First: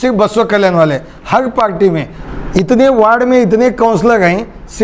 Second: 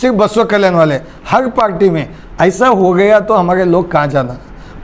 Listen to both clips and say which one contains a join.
first; 1 cut; at 2.2 s

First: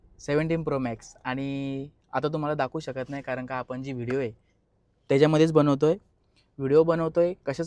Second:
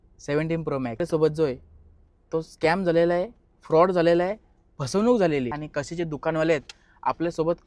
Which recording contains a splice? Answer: second; 2 cuts; at 1.0 s, 5.6 s

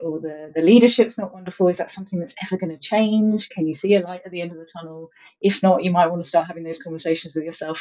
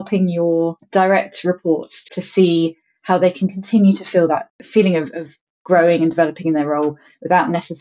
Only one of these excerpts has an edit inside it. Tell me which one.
second; 3 cuts; at 0.8 s, 2.0 s, 4.6 s

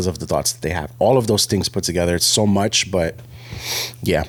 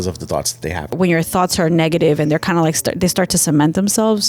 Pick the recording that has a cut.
second; 1 cut; at 1.0 s

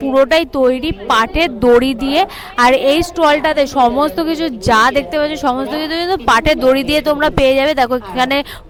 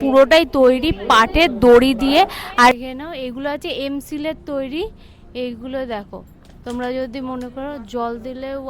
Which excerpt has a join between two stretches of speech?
second; 1 cut; at 2.7 s

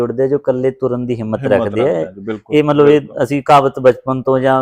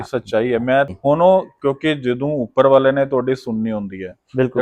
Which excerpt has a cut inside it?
second; 1 cut; at 0.9 s

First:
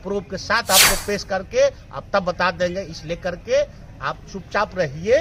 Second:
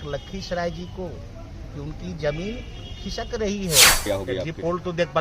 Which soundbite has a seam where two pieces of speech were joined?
second; 1 cut; at 4.0 s

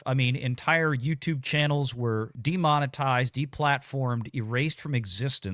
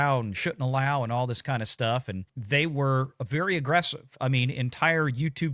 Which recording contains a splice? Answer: first; 1 cut; at 2.3 s

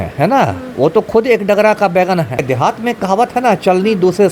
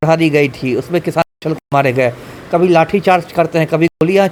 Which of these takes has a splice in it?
first; 1 cut; at 2.4 s

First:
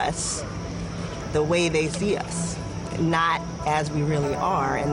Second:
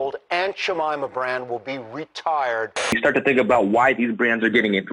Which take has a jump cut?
second; 1 cut; at 2.9 s

